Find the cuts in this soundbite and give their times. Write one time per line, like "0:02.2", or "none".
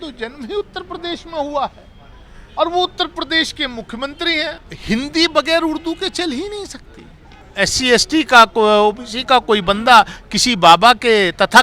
0:04.7
0:07.4